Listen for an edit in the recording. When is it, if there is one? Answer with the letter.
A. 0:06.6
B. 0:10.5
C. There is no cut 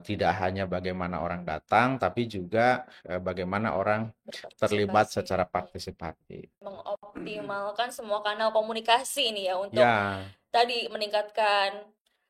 A